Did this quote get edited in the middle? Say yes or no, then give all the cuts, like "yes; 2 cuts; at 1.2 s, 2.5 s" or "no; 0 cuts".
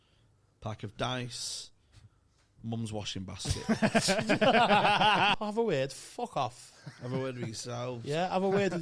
yes; 1 cut; at 5.3 s